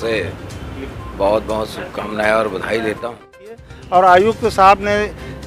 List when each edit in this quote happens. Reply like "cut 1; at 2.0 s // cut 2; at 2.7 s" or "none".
cut 1; at 3.7 s